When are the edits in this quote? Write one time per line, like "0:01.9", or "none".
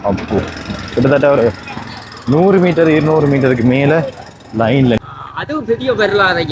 0:05.0